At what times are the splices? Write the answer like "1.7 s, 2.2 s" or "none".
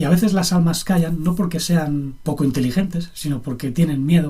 2.1 s